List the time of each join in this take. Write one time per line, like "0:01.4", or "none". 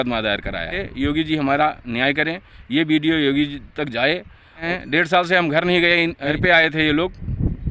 0:00.9
0:04.7
0:06.3